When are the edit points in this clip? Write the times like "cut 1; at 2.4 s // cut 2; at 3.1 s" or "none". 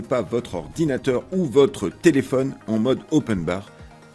none